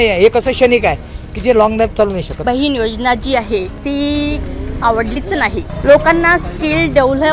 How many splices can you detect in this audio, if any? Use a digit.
3